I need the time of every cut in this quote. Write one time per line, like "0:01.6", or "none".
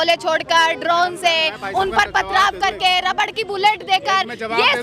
none